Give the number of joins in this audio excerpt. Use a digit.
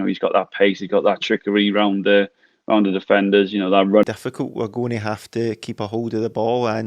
1